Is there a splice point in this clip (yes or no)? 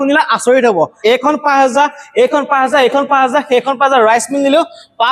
yes